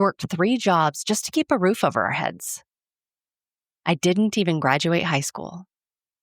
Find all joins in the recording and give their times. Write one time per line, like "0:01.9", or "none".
none